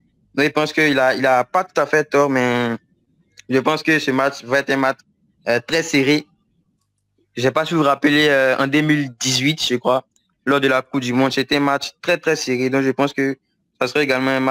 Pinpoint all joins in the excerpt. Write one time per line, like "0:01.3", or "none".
none